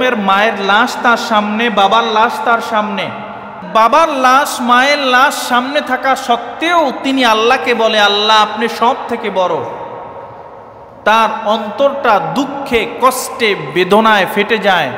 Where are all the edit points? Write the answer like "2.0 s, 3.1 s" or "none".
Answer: 3.6 s

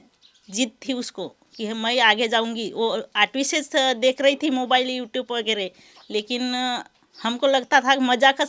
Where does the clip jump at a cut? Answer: none

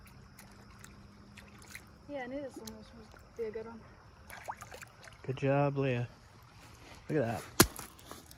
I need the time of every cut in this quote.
none

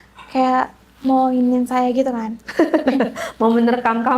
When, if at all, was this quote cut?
none

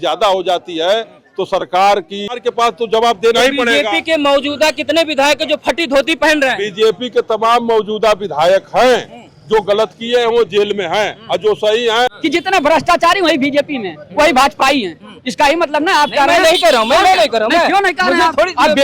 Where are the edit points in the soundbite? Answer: 2.4 s, 12.1 s

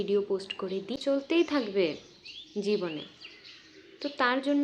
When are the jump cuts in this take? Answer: 0.9 s

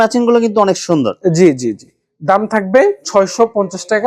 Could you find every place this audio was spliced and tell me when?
none

